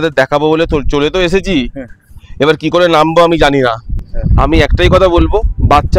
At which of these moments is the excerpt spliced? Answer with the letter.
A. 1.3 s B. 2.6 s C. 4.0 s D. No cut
C